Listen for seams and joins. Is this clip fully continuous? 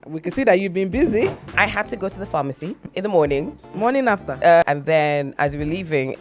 no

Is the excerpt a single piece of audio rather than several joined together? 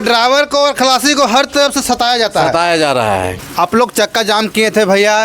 no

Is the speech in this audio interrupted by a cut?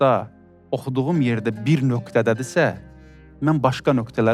no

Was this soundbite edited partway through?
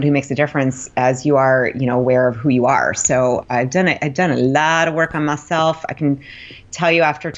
no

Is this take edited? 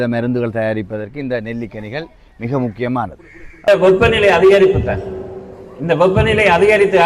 yes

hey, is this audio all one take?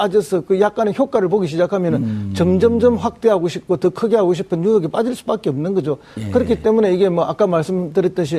no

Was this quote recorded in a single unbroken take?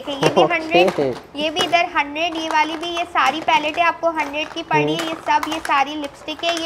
yes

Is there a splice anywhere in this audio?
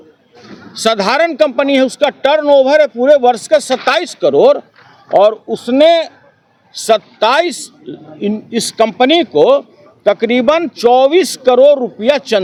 no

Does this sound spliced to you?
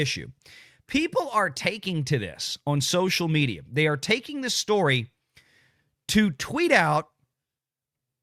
no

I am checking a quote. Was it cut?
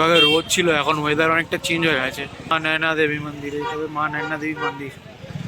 yes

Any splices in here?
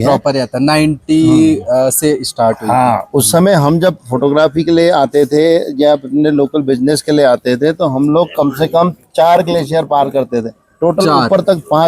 no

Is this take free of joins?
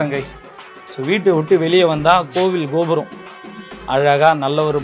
yes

